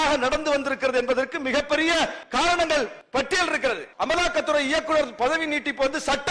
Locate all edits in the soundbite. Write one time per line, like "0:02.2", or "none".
0:02.2
0:03.0
0:03.9